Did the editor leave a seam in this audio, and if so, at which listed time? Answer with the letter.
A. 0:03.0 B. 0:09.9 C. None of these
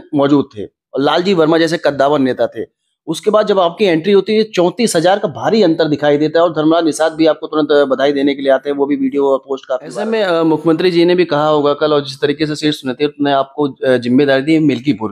B